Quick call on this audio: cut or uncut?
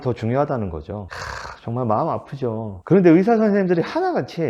cut